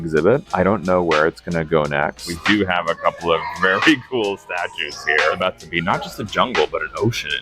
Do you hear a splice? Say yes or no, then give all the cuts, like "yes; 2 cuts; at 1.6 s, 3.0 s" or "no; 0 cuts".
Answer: yes; 2 cuts; at 2.3 s, 5.4 s